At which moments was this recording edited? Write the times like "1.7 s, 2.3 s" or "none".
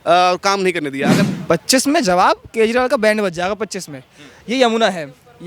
1.2 s